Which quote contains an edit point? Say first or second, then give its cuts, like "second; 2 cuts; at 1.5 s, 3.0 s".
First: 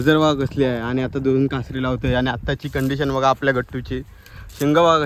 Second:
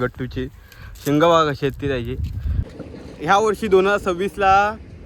second; 1 cut; at 2.7 s